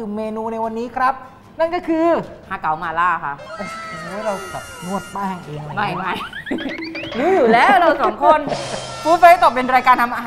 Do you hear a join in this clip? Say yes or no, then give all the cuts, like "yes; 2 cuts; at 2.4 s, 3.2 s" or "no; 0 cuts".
no; 0 cuts